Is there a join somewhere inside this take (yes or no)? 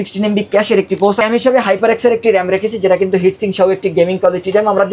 yes